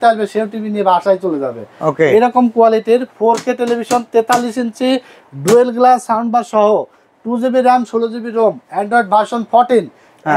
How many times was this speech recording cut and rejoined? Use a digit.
0